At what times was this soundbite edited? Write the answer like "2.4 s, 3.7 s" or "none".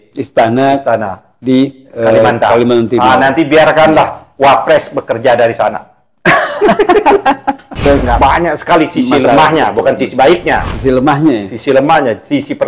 7.9 s